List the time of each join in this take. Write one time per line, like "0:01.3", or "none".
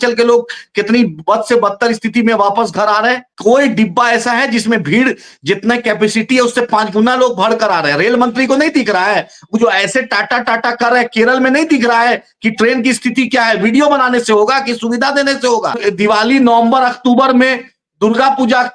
0:03.3
0:15.8